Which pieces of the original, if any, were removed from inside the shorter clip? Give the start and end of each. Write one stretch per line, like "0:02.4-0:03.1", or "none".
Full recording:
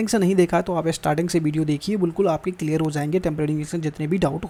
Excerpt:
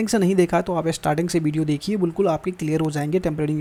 none